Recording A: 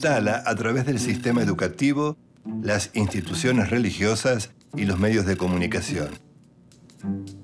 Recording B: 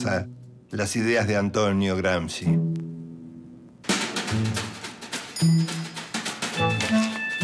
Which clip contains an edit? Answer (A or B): A